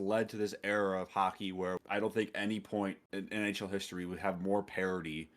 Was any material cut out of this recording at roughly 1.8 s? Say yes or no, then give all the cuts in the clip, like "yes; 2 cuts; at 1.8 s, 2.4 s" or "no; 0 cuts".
yes; 2 cuts; at 1.8 s, 3.0 s